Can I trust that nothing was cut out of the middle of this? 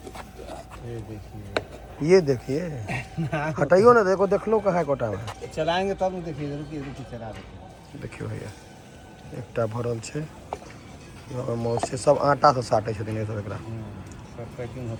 yes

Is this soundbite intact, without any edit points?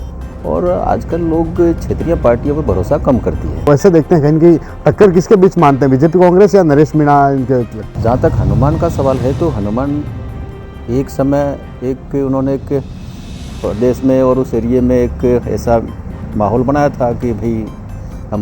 no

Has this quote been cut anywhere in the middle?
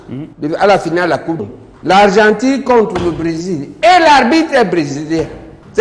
no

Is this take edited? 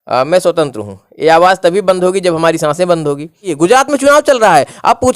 yes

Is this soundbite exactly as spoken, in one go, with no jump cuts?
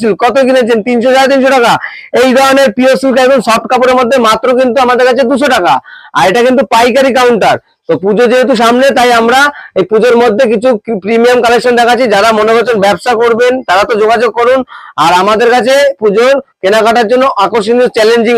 yes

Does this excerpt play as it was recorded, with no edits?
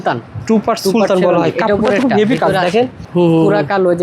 no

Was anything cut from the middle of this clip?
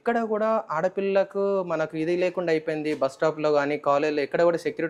no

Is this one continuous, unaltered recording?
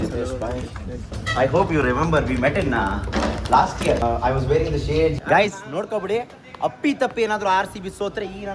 no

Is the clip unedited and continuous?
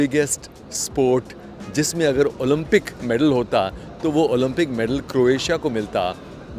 yes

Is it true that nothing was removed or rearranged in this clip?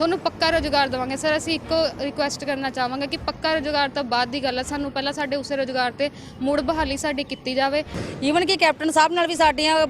no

